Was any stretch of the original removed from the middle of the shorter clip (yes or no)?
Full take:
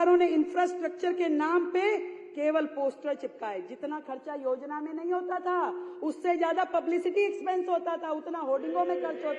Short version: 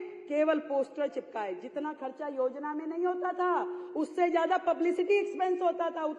no